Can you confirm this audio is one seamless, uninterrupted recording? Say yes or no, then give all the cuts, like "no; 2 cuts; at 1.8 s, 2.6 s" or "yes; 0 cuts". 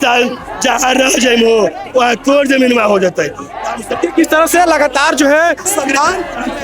no; 1 cut; at 5.6 s